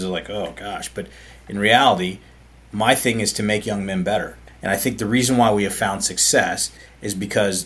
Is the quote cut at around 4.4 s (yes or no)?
yes